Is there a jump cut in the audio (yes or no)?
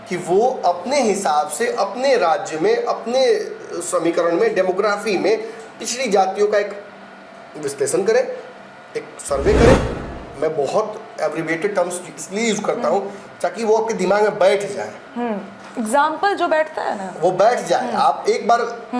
yes